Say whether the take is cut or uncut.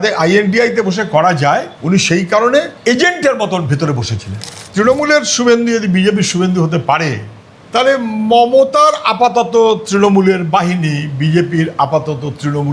cut